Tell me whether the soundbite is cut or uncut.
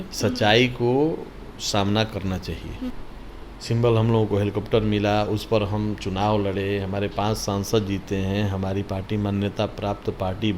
cut